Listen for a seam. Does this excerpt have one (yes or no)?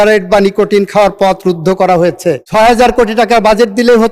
yes